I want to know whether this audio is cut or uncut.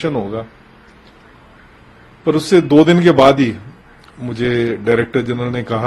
uncut